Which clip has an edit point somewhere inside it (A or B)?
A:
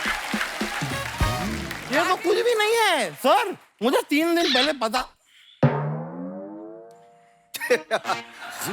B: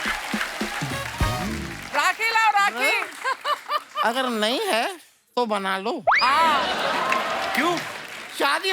A